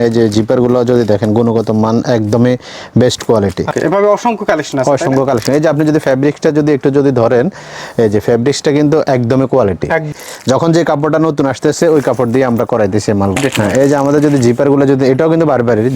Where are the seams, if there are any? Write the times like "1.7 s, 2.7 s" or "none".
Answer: 3.7 s, 10.1 s, 13.4 s